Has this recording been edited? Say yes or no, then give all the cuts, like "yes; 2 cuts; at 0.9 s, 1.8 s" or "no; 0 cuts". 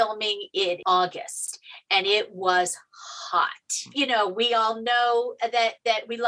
yes; 1 cut; at 3.8 s